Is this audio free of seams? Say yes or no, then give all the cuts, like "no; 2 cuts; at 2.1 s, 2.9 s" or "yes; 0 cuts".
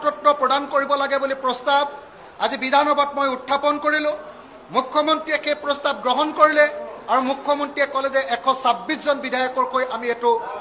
yes; 0 cuts